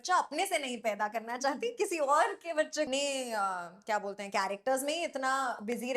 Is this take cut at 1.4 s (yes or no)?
no